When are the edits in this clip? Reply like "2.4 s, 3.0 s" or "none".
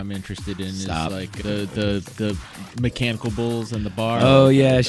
none